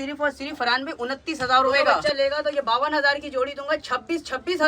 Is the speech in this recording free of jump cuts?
no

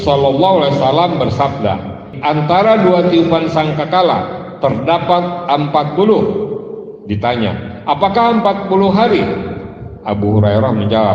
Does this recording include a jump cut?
yes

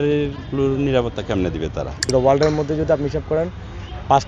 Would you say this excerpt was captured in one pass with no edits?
no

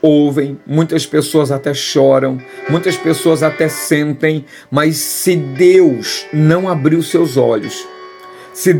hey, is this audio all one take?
yes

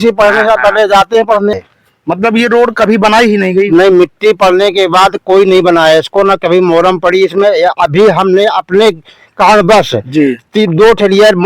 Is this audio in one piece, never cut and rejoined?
no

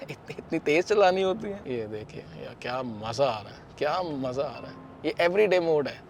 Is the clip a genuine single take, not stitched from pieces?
no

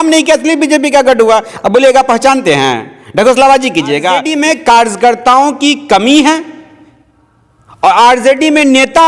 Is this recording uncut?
no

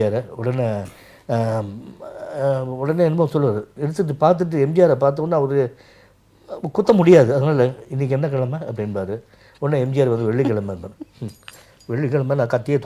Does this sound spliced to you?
no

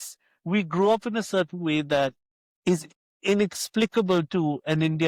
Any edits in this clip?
no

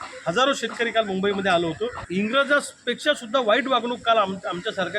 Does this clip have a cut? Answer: yes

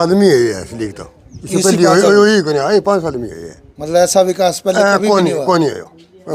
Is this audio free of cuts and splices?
yes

